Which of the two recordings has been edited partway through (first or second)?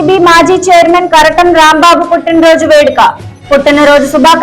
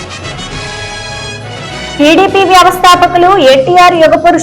second